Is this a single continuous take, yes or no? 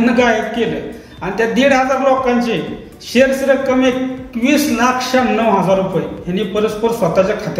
yes